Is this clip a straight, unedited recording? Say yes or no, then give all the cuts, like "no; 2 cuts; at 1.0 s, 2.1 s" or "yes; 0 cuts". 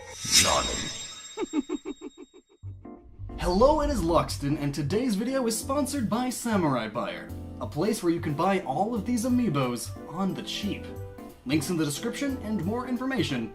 no; 1 cut; at 8.4 s